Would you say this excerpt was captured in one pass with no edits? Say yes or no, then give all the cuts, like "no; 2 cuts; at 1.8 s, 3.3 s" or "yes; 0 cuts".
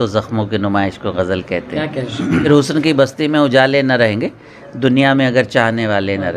no; 1 cut; at 2.5 s